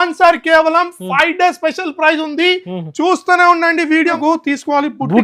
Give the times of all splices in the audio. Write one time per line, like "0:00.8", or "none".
0:04.1